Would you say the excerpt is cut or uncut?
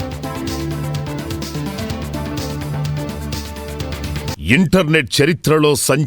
cut